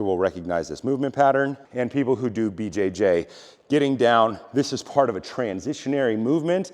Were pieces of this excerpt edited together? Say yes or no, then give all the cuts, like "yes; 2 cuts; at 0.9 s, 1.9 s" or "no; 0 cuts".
yes; 1 cut; at 1.6 s